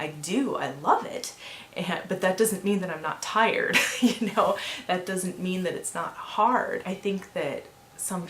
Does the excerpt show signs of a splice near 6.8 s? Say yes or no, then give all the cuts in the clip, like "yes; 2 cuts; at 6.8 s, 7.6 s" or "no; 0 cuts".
yes; 1 cut; at 6.8 s